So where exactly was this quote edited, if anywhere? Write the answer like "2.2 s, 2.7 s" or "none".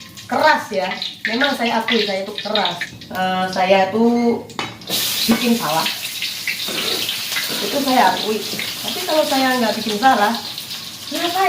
2.9 s